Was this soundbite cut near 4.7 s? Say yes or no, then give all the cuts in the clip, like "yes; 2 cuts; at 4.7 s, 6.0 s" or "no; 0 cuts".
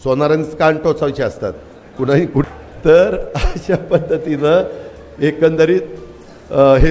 no; 1 cut; at 2.4 s